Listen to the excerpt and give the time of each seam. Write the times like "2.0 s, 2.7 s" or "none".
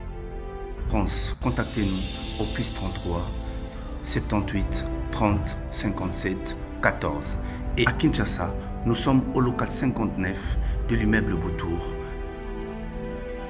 none